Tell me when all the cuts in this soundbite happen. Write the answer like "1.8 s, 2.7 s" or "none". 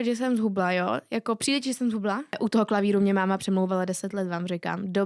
2.4 s